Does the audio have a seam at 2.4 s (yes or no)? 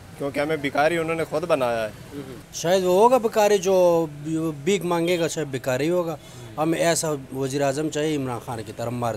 yes